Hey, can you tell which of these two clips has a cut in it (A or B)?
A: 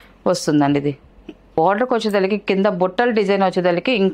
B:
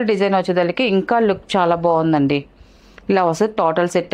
A